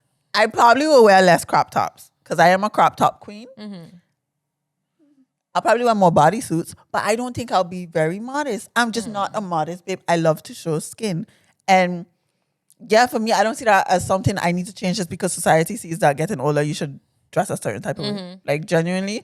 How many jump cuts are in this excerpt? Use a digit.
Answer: 1